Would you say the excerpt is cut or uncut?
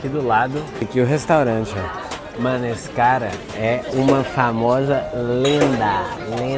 cut